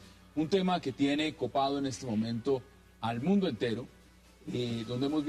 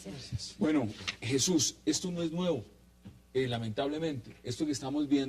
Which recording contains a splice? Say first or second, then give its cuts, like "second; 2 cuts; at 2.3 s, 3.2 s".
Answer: second; 1 cut; at 4.3 s